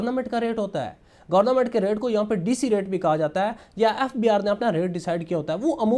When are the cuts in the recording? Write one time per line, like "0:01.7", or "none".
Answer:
none